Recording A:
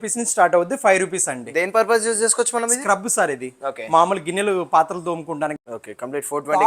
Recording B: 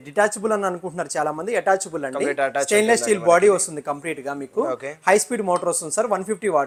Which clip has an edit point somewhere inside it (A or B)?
A